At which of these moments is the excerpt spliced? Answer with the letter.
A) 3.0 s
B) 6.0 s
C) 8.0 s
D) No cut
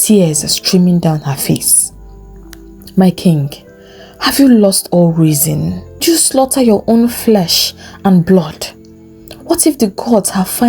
B